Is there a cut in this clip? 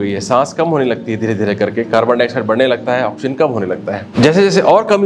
yes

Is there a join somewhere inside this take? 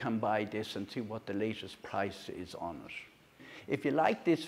yes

